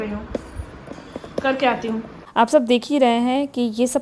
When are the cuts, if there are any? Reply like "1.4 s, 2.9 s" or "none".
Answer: 2.2 s